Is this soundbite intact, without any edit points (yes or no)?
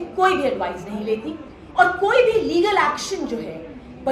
yes